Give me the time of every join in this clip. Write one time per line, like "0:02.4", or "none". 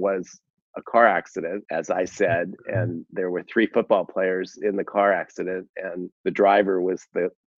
0:01.6
0:06.1